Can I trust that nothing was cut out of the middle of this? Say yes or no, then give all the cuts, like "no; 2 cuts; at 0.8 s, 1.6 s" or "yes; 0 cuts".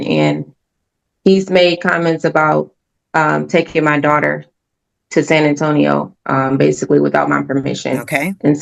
yes; 0 cuts